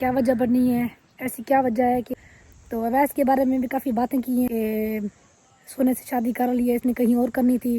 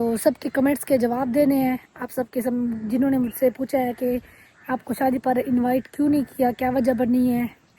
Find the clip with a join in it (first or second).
first